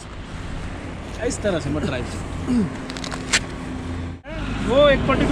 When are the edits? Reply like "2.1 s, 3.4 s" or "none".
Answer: 4.3 s